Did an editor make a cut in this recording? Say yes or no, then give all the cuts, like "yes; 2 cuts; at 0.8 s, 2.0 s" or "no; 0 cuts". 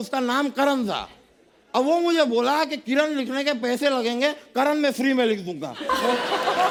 no; 0 cuts